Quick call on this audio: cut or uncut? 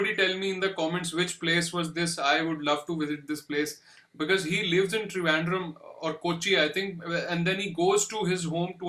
uncut